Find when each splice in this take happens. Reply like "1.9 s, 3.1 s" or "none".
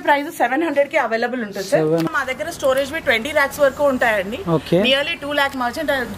2.1 s